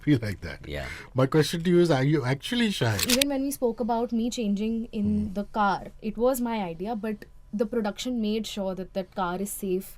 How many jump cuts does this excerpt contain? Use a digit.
1